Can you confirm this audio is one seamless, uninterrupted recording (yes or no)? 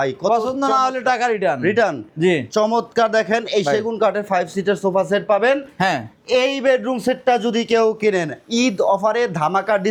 yes